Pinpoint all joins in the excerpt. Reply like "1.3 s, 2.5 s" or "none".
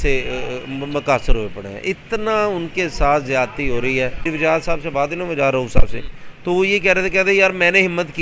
4.2 s